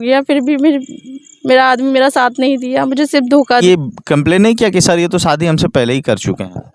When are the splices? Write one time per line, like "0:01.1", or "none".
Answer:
0:03.6